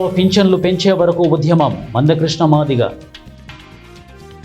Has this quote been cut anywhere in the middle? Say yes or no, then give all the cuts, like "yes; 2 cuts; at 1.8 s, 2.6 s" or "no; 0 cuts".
yes; 1 cut; at 3.5 s